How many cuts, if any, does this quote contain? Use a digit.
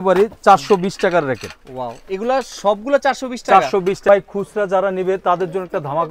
1